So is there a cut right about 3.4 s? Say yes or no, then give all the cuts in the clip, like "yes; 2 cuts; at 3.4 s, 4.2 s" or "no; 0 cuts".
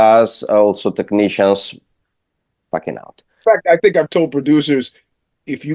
yes; 1 cut; at 3.4 s